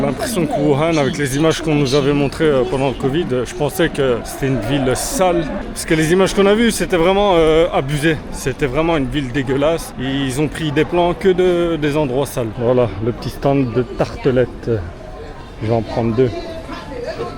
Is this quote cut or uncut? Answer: uncut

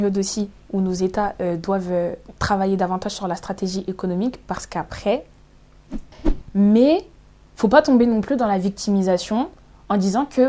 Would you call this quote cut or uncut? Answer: cut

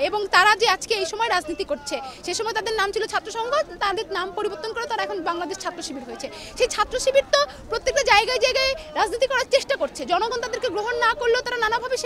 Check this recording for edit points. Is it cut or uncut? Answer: uncut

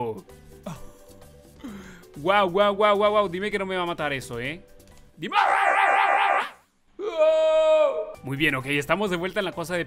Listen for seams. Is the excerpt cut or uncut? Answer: uncut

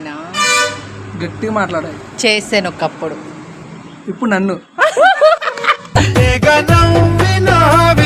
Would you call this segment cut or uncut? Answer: uncut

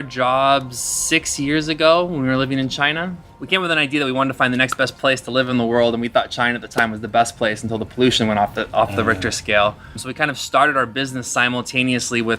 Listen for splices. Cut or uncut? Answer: cut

